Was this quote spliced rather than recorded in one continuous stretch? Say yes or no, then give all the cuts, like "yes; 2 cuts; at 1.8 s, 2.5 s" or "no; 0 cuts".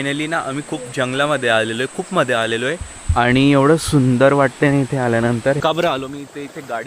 yes; 1 cut; at 5.6 s